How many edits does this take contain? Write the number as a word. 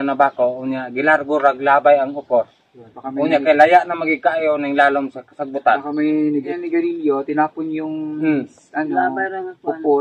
one